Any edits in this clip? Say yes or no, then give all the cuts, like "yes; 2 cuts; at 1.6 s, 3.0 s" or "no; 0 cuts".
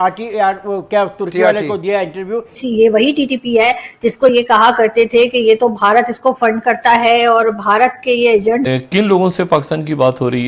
yes; 2 cuts; at 2.5 s, 8.7 s